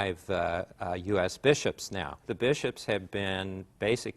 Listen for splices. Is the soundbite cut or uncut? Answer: cut